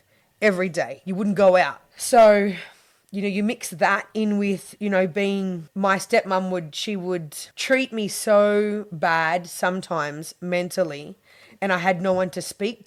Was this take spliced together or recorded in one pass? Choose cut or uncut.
uncut